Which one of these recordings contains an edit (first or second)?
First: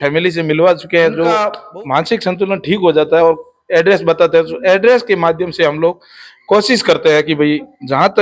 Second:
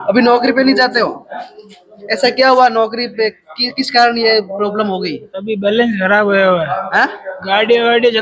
first